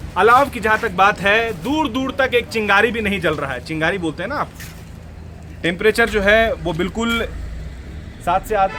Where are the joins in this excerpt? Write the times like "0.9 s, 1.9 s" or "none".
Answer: none